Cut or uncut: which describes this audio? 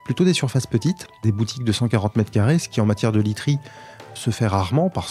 cut